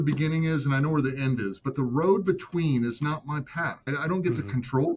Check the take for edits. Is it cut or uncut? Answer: cut